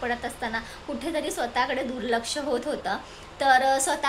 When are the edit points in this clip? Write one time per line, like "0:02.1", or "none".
none